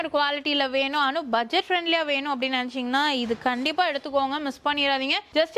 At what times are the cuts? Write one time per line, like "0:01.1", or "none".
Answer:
none